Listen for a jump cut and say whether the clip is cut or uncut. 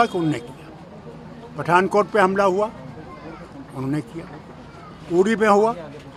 uncut